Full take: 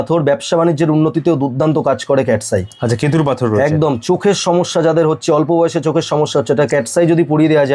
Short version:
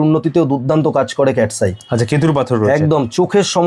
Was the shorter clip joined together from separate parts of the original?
no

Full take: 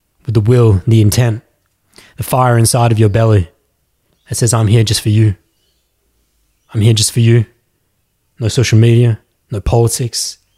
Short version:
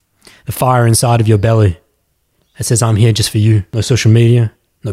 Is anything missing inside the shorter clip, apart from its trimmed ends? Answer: yes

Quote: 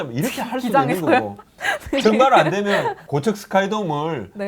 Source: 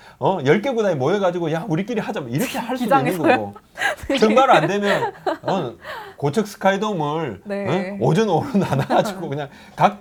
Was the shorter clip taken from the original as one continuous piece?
no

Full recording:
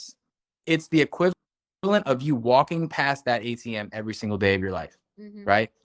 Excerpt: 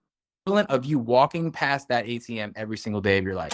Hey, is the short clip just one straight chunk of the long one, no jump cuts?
yes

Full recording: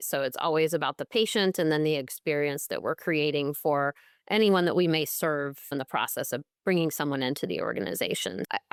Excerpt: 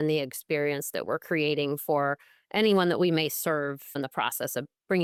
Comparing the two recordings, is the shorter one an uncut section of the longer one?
yes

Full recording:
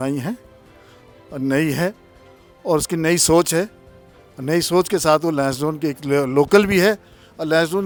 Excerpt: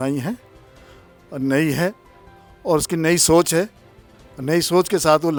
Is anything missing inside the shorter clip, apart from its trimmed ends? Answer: no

